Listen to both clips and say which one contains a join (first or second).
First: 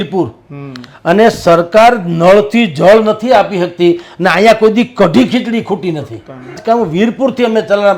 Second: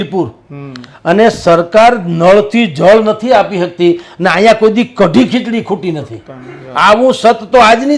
first